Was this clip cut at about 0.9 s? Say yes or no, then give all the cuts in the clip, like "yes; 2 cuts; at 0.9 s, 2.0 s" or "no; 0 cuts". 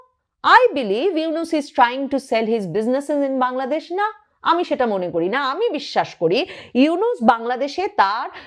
no; 0 cuts